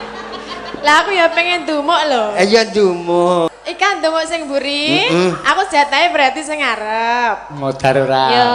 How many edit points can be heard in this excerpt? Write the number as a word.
one